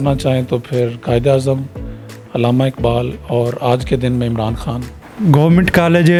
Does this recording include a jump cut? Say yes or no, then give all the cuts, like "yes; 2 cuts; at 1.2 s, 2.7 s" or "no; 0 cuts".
no; 0 cuts